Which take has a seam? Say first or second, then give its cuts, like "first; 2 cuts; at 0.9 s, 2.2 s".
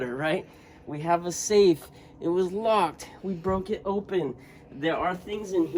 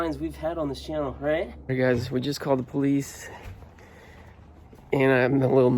second; 1 cut; at 1.7 s